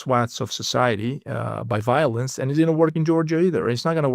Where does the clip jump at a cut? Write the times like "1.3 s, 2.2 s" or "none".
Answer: none